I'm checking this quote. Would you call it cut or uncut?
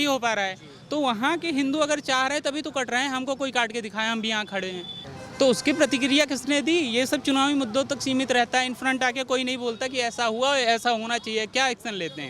uncut